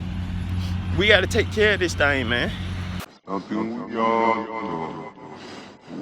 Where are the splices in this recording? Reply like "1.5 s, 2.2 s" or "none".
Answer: 3.0 s